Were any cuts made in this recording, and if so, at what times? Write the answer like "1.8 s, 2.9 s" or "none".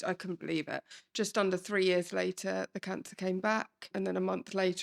1.0 s, 3.9 s